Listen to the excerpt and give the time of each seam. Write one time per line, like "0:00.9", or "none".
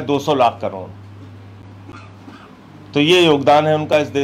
none